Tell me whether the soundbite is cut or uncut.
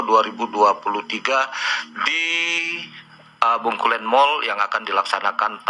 uncut